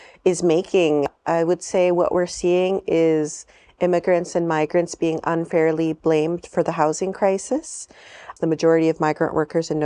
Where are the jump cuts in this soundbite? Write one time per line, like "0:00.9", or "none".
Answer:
0:01.1
0:08.3